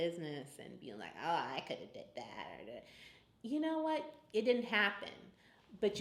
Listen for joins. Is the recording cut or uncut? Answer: uncut